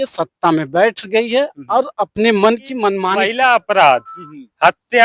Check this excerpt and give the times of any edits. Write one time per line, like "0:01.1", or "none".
0:03.0

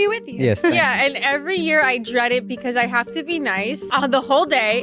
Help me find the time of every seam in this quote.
0:03.8

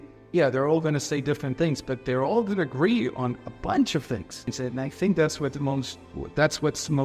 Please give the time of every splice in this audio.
0:04.5

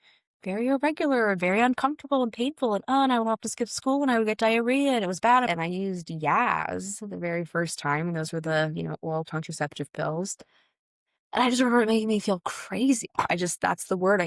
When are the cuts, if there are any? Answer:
0:05.5

